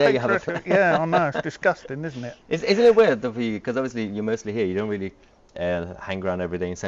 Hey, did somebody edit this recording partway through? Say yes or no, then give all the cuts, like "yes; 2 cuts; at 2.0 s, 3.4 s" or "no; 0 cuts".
no; 0 cuts